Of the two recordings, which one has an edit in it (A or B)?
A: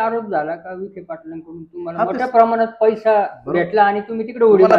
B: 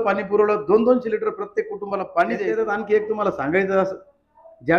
B